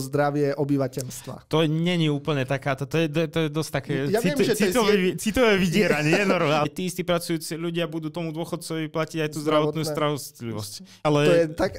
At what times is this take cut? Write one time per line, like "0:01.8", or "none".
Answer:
0:06.6
0:11.0